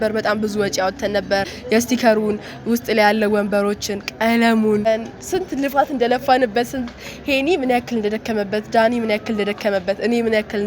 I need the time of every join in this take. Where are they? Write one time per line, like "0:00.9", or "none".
0:01.6
0:04.9